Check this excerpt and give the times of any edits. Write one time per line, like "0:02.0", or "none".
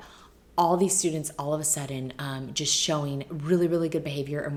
none